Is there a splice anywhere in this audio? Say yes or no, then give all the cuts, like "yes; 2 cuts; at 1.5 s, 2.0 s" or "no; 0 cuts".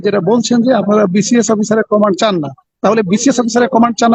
no; 0 cuts